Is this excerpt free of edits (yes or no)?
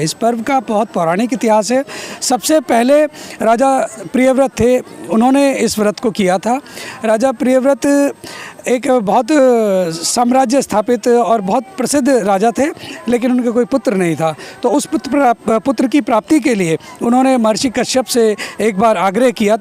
yes